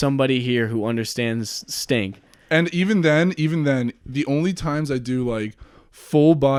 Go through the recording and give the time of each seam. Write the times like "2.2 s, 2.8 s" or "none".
none